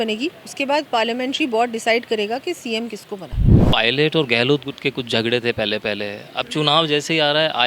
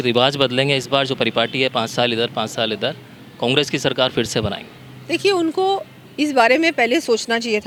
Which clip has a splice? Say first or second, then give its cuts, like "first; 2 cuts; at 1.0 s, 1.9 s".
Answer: first; 1 cut; at 3.5 s